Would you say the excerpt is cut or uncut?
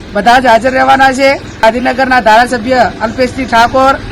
cut